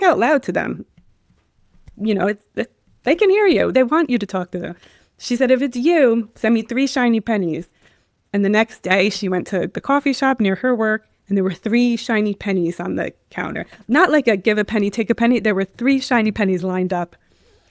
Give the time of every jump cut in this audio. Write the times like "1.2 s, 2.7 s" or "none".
none